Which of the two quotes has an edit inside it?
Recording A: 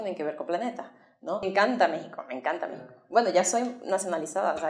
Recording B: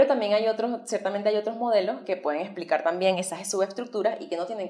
A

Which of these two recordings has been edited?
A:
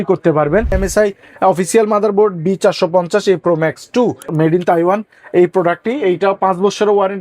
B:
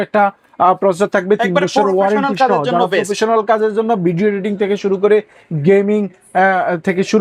A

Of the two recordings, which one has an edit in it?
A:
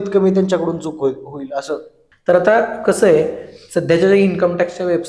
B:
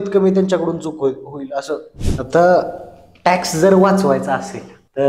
B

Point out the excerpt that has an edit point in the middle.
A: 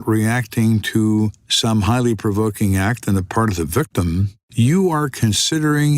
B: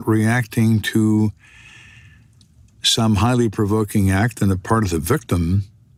A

